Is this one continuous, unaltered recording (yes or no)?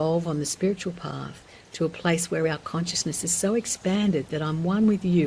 yes